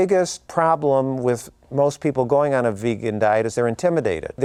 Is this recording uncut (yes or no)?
yes